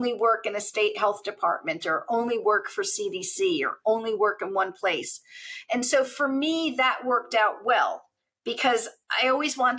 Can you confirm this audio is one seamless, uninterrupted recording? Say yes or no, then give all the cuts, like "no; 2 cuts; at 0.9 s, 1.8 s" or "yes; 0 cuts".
yes; 0 cuts